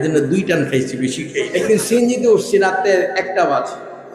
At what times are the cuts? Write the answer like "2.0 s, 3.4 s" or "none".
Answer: 1.5 s